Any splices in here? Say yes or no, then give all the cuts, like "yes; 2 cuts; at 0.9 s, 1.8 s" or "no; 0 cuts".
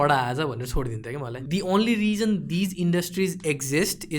yes; 1 cut; at 1.3 s